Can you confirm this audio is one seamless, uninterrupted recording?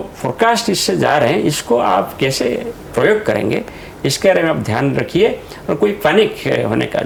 yes; 0 cuts

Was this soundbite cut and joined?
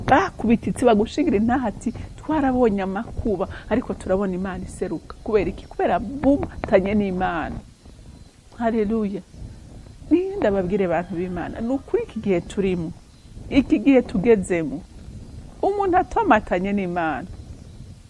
no; 0 cuts

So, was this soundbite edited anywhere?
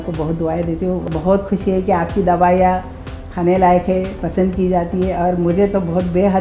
yes; 1 cut; at 1.1 s

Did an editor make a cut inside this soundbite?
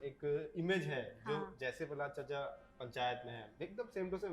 no; 0 cuts

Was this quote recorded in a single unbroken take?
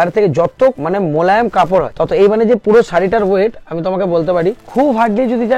no; 3 cuts; at 0.8 s, 1.9 s, 4.6 s

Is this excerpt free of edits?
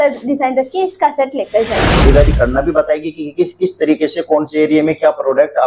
no; 1 cut; at 2.0 s

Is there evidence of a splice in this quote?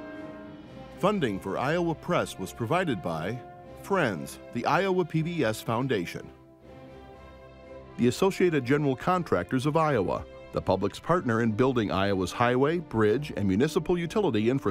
yes; 3 cuts; at 1.0 s, 6.2 s, 8.0 s

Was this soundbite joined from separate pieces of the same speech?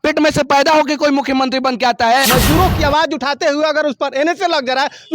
yes; 1 cut; at 2.2 s

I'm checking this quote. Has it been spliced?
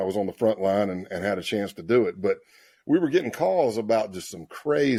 no; 0 cuts

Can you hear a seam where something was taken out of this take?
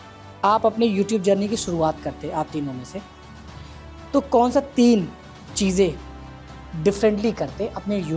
no; 0 cuts

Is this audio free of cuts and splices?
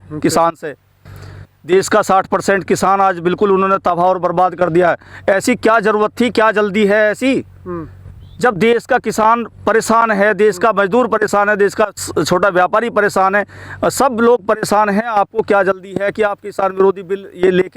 yes; 0 cuts

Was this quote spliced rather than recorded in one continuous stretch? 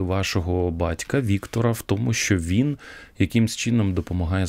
no; 0 cuts

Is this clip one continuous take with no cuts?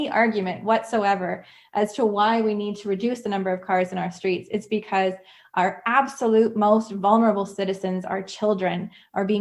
yes; 0 cuts

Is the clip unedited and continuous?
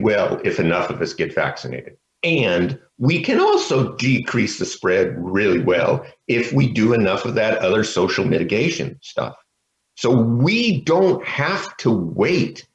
yes; 0 cuts

